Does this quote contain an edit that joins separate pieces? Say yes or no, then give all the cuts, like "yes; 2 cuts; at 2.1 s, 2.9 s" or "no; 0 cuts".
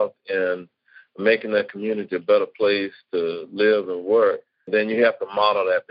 yes; 1 cut; at 4.7 s